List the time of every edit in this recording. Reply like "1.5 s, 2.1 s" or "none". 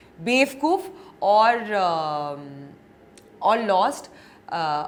none